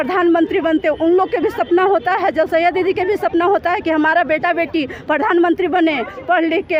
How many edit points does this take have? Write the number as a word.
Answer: zero